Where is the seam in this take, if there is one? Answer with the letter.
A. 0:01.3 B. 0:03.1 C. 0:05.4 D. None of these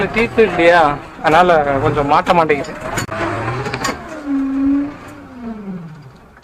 B